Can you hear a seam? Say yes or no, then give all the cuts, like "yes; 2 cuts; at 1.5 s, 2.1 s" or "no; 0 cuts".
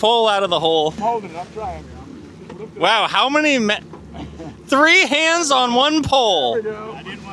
yes; 1 cut; at 1.0 s